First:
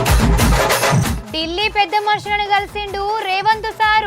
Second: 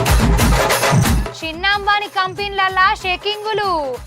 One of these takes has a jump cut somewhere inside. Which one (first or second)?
first